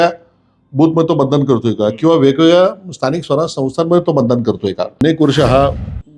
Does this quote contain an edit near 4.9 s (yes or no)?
yes